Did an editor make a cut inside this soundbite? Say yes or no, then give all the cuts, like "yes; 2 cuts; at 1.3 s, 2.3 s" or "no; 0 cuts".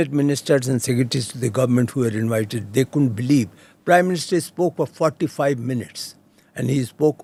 no; 0 cuts